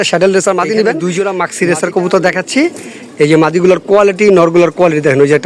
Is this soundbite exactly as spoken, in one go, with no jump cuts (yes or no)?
no